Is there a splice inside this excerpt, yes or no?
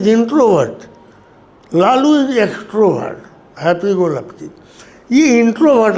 no